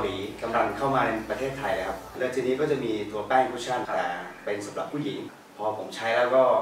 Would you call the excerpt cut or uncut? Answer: cut